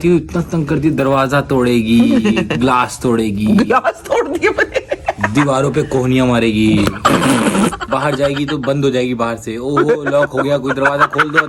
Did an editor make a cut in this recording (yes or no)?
no